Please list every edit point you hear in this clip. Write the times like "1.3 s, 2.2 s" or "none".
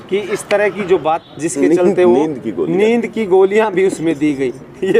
1.2 s